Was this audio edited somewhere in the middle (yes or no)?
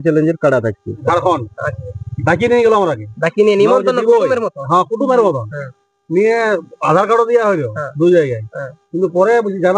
yes